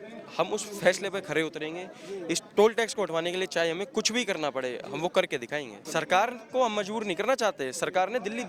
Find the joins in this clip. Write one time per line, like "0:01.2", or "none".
0:05.8